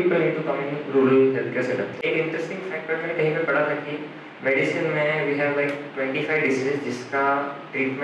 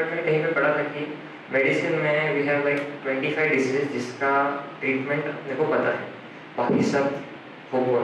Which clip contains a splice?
first; 1 cut; at 2.0 s

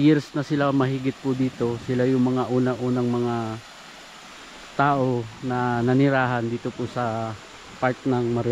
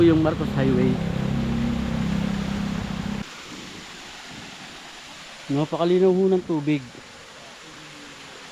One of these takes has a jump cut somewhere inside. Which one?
second; 1 cut; at 3.2 s

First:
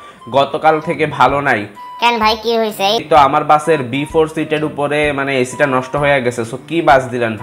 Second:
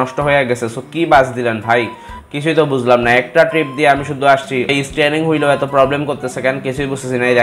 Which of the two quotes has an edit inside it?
second; 1 cut; at 4.7 s

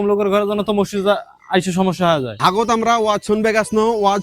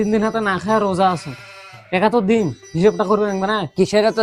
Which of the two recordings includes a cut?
first; 1 cut; at 2.3 s

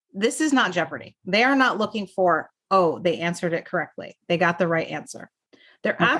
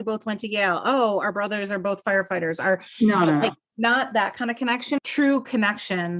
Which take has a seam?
second; 1 cut; at 5.0 s

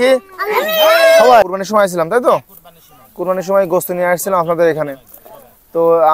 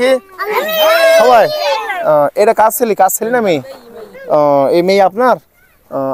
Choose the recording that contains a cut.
first; 1 cut; at 1.5 s

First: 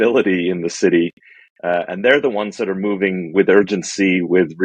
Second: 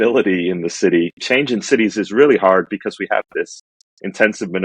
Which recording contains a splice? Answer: second; 1 cut; at 1.2 s

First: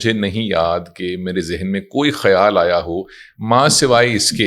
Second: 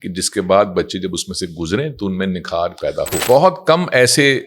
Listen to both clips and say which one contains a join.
second; 1 cut; at 3.2 s

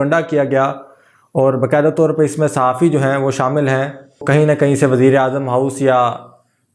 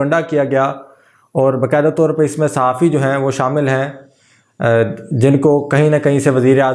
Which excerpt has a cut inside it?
first; 1 cut; at 4.2 s

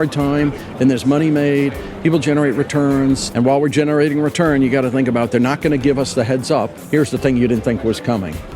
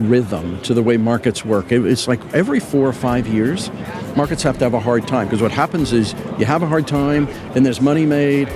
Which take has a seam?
first; 2 cuts; at 3.2 s, 6.7 s

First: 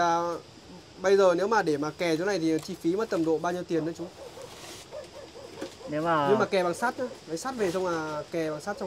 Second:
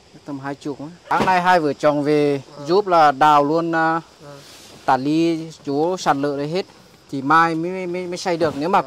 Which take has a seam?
second; 1 cut; at 1.1 s

